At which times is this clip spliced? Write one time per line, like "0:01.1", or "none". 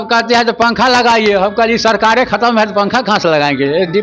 none

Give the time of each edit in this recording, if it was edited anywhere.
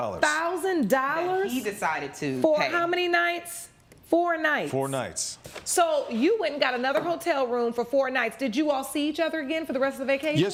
none

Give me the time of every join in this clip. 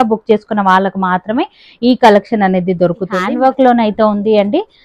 0:03.2

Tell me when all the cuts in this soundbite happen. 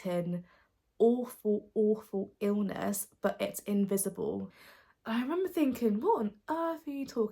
0:04.5

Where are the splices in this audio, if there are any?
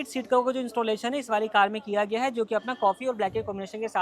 none

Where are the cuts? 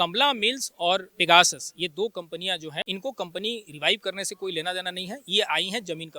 0:01.1
0:02.9

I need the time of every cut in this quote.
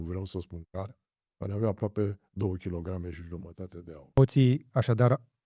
0:04.2

